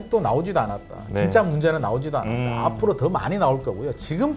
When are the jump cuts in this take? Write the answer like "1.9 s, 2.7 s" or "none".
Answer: none